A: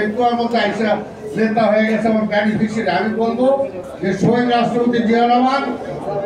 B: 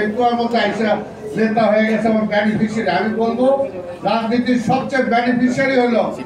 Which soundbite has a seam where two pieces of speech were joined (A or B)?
A